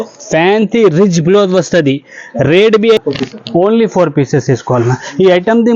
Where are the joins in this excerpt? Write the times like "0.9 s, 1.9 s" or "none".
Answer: 3.0 s